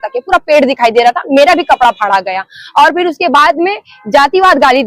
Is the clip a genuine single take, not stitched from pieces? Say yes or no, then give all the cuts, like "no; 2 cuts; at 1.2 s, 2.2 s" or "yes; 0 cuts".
no; 1 cut; at 3.4 s